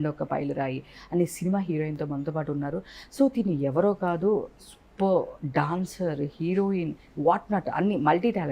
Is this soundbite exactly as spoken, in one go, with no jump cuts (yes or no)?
yes